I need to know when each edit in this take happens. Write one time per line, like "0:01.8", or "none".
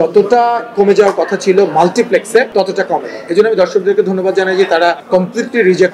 0:02.5
0:05.0